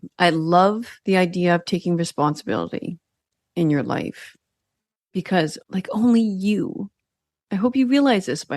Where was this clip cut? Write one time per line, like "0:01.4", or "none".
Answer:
0:00.9
0:05.6